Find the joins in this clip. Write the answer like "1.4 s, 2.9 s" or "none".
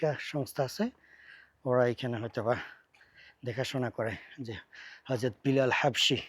none